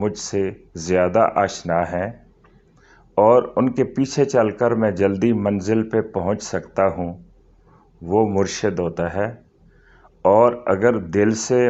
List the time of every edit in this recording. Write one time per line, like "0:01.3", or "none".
none